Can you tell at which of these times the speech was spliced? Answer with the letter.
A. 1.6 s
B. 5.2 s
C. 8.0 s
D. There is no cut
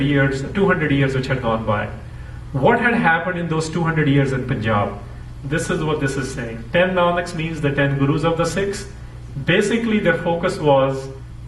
A